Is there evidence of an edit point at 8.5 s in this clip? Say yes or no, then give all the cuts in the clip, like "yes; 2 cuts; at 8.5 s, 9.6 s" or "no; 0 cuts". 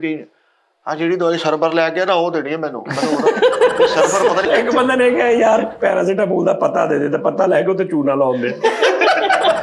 no; 1 cut; at 4.4 s